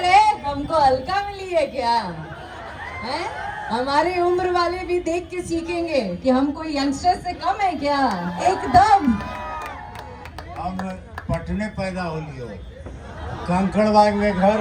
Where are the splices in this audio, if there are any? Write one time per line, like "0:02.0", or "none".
none